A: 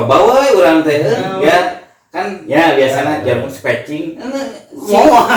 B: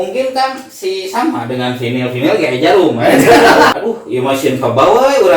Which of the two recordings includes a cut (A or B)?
B